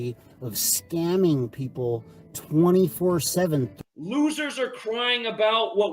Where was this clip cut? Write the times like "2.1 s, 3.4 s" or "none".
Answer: 3.8 s